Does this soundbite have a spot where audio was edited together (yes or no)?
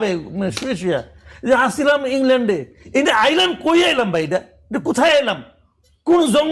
no